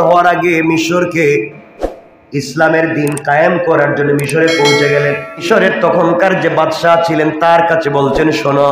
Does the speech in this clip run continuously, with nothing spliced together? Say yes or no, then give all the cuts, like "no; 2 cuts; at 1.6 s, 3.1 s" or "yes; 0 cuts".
no; 1 cut; at 5.4 s